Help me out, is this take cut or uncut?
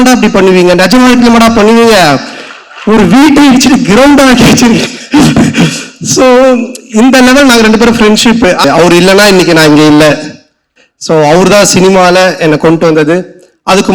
cut